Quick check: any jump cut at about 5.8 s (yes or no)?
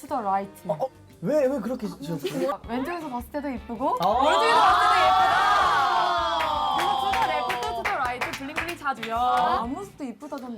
no